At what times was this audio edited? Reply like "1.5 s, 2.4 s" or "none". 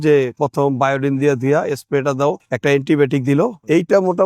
none